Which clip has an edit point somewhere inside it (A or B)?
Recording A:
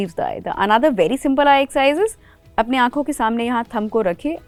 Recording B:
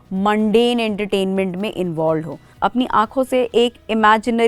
B